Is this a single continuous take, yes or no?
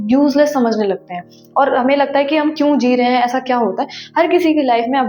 yes